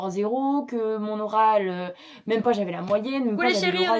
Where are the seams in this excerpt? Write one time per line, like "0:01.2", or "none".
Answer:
none